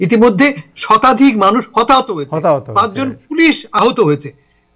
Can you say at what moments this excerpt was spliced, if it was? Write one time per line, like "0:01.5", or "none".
0:03.7